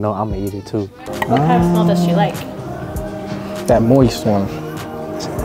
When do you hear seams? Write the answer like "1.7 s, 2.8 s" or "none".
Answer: 1.0 s

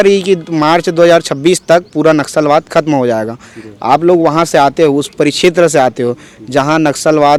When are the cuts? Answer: none

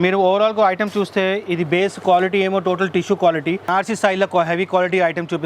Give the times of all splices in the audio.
3.7 s

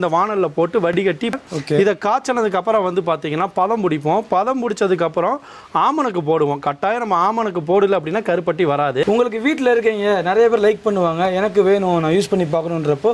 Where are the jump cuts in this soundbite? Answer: 1.1 s, 9.0 s

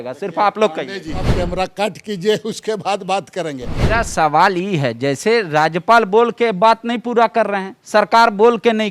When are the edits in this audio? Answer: 1.3 s, 3.7 s

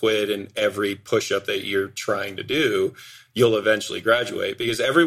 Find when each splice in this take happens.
none

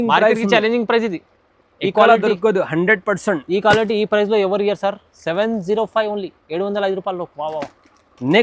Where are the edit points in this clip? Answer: none

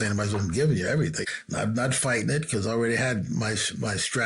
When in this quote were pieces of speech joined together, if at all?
1.2 s

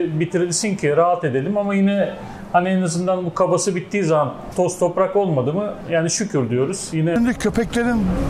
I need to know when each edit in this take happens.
7.1 s

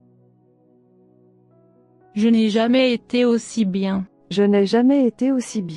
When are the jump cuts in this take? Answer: 1.5 s, 4.2 s

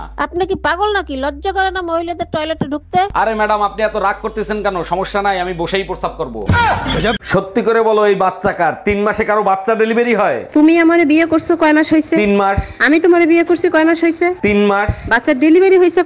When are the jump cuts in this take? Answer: 7.2 s

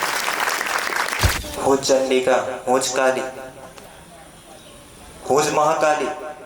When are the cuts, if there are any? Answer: 1.4 s

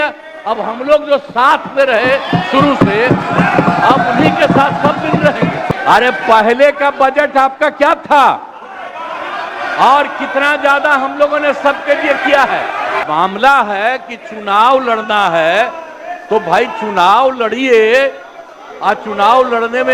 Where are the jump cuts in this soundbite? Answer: 5.7 s, 13.0 s

